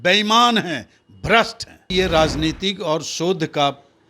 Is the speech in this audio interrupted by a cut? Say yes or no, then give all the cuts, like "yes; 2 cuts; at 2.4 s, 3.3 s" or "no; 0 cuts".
yes; 1 cut; at 1.8 s